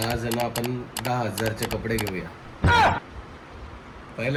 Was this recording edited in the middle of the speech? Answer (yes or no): no